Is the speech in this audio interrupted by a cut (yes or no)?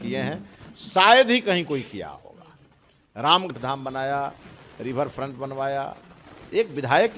yes